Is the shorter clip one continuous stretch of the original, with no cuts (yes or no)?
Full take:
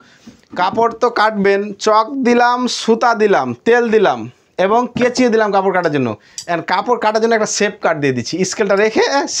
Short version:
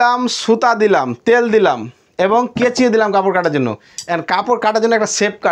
yes